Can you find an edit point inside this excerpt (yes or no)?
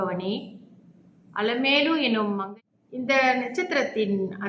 yes